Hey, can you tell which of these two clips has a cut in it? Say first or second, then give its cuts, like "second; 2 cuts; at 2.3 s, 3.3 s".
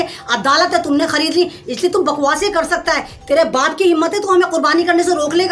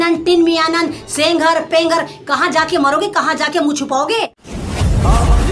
second; 1 cut; at 4.5 s